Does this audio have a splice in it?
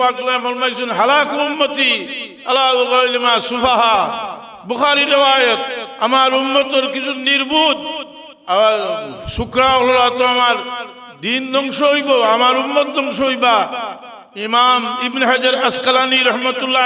no; 0 cuts

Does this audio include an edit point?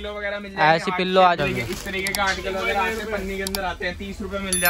yes; 1 cut; at 1.4 s

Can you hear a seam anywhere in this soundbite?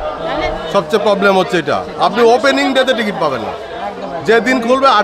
no; 0 cuts

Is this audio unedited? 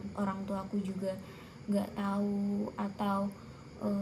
yes; 0 cuts

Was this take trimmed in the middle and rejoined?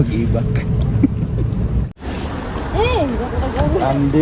yes; 1 cut; at 1.9 s

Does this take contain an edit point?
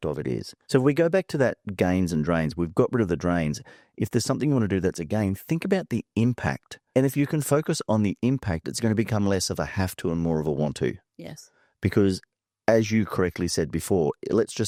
no; 0 cuts

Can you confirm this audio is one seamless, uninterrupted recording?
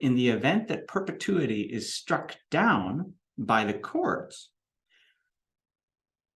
yes; 0 cuts

